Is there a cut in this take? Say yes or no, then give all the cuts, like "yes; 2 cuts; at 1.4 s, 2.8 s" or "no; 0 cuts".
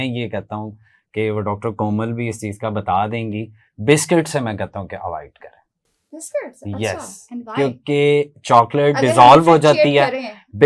no; 0 cuts